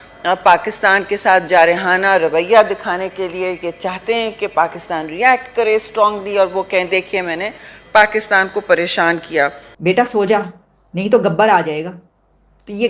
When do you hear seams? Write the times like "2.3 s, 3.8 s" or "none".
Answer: 9.7 s